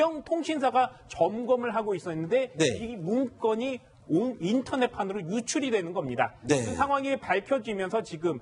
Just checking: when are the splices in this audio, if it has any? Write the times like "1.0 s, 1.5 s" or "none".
6.1 s